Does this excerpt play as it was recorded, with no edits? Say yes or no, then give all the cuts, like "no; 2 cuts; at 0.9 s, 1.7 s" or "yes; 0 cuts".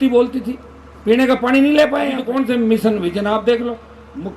no; 1 cut; at 2.3 s